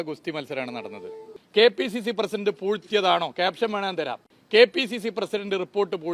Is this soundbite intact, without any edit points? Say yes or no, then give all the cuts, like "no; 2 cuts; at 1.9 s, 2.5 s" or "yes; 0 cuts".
no; 1 cut; at 1.3 s